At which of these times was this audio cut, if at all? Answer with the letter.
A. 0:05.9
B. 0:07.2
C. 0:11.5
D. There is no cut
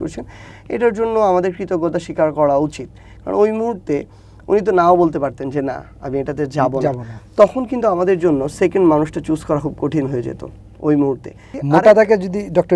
C